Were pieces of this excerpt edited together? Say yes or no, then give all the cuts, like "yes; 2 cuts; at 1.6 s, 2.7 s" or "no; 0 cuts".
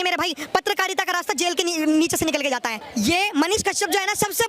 yes; 1 cut; at 2.8 s